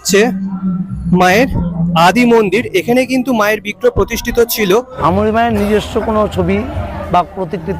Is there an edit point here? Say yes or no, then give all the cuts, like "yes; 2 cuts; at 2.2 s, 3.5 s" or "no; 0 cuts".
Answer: yes; 1 cut; at 5.0 s